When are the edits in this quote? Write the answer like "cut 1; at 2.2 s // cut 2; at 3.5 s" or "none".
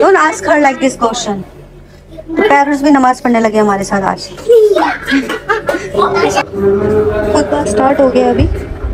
cut 1; at 6.4 s

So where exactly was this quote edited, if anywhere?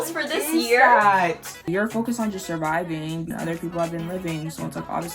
cut 1; at 1.6 s // cut 2; at 3.3 s

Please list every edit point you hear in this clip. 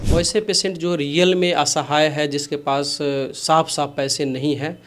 none

